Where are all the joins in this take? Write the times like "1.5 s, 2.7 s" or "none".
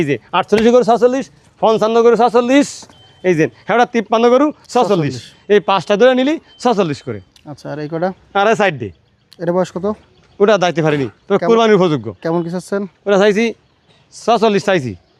none